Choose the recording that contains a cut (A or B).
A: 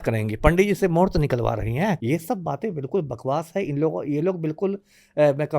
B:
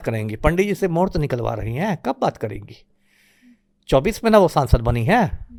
A